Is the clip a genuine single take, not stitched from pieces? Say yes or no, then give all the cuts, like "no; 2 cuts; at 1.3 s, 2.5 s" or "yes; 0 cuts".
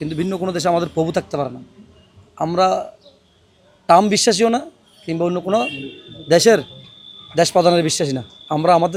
yes; 0 cuts